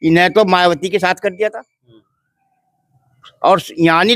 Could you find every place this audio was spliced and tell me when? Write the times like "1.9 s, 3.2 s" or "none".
none